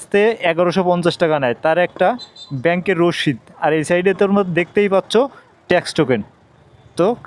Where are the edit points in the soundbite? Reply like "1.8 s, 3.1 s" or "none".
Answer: none